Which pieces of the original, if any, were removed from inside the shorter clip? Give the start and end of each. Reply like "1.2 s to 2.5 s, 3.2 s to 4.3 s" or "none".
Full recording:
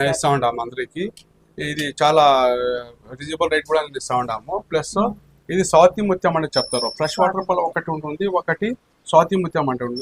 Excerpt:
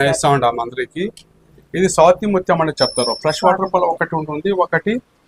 1.5 s to 5.3 s